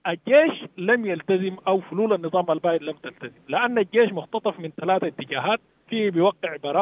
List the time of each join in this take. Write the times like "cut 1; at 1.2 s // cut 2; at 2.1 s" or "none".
cut 1; at 5.8 s